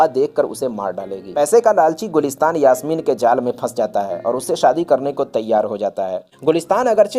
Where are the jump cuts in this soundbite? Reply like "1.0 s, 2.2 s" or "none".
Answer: 1.2 s, 6.3 s